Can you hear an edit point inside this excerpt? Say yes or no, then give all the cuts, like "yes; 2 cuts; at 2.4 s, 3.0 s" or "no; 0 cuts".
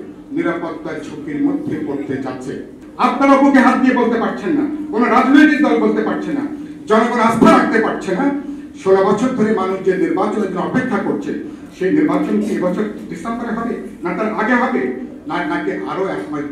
yes; 1 cut; at 2.8 s